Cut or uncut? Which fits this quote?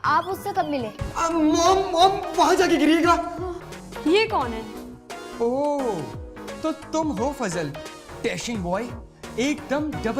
cut